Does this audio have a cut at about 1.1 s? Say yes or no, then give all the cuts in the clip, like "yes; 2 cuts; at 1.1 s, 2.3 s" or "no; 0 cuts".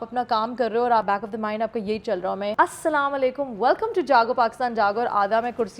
yes; 2 cuts; at 1.1 s, 2.5 s